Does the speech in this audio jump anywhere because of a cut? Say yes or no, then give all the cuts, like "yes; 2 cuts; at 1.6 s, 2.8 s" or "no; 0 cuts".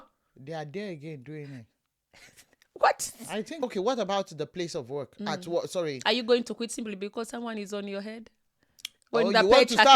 yes; 1 cut; at 3.6 s